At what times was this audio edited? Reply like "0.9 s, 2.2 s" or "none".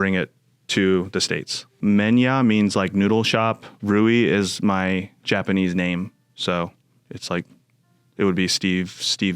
1.8 s